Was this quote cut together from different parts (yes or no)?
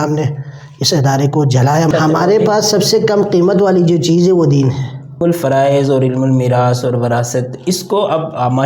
yes